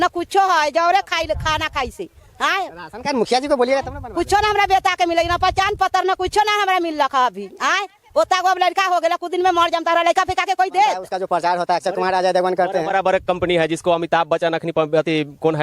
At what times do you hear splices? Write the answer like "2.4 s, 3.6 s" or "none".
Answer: 11.1 s